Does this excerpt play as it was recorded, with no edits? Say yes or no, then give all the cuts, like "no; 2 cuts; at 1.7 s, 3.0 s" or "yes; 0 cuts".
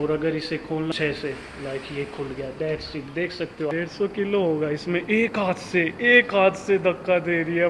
no; 2 cuts; at 0.9 s, 3.7 s